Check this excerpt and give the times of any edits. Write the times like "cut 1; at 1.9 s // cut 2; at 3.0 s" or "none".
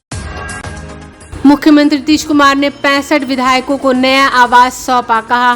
cut 1; at 1.1 s